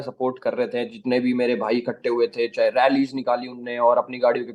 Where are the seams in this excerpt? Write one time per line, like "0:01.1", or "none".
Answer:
none